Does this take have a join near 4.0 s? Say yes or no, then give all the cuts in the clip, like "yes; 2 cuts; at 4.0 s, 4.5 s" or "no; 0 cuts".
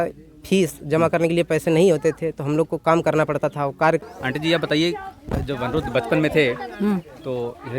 yes; 1 cut; at 4.0 s